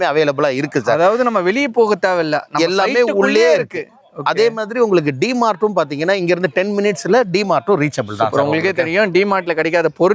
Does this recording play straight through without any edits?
yes; 0 cuts

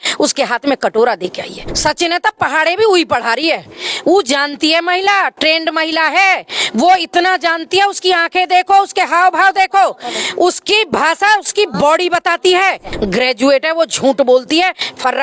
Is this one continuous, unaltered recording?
no; 2 cuts; at 1.7 s, 12.9 s

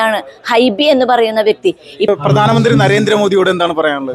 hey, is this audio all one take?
no; 1 cut; at 2.1 s

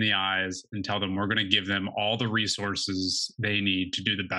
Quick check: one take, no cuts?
yes; 0 cuts

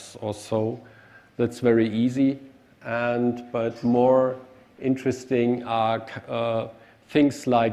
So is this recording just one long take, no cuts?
no; 1 cut; at 4.3 s

